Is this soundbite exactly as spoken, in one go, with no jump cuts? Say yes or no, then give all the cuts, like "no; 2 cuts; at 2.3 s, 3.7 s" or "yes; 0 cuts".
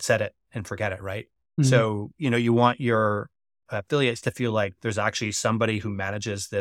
yes; 0 cuts